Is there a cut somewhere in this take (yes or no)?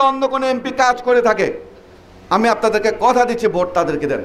no